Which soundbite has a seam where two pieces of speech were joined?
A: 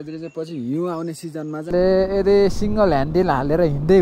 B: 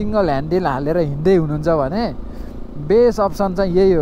A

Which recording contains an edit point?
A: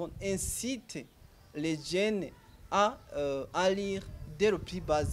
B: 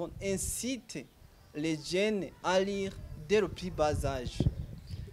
B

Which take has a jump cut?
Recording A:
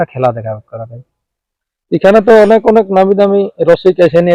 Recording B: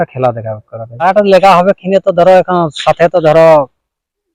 B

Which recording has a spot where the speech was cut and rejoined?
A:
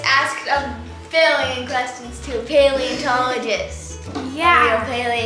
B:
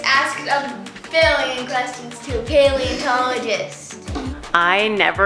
B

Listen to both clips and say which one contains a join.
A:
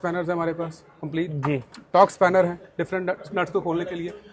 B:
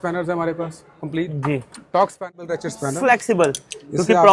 B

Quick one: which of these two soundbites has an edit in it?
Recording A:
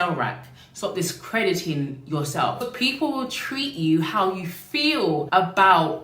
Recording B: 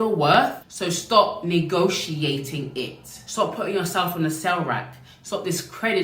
A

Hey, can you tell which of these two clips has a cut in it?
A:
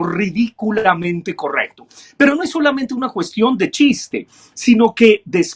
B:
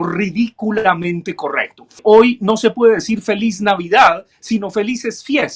B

